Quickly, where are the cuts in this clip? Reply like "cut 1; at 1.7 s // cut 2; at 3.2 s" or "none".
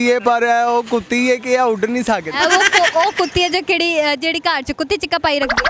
none